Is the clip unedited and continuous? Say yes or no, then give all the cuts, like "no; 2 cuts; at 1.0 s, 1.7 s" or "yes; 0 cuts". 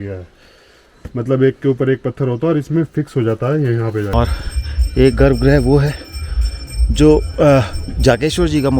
no; 1 cut; at 4.1 s